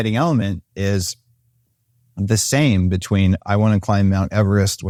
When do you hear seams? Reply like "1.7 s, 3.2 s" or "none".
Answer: none